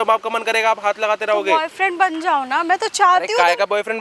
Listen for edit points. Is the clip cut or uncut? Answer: uncut